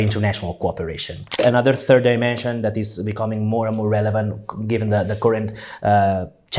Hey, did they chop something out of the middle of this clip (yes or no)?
yes